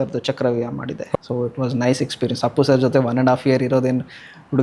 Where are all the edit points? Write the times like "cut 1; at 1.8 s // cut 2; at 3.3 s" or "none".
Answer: cut 1; at 1.2 s